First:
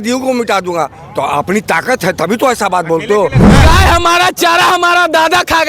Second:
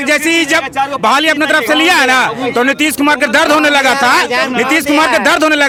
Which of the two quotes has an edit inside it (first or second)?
first